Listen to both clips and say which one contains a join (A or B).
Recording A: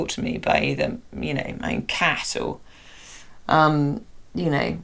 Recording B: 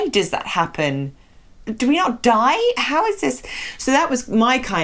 B